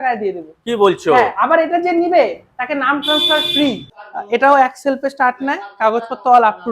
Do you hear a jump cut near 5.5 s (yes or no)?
no